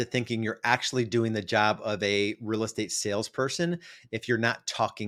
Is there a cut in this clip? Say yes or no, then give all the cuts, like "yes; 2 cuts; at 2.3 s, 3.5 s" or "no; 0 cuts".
no; 0 cuts